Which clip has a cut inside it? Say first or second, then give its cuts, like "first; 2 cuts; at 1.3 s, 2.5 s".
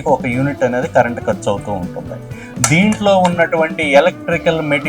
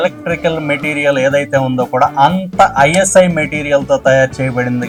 first; 1 cut; at 2.4 s